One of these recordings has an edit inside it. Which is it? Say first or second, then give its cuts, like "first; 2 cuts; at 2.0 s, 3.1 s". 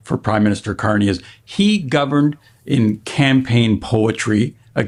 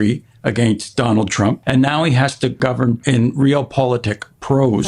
second; 2 cuts; at 1.6 s, 2.8 s